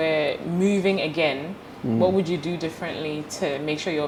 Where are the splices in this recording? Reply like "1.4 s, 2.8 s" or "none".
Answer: none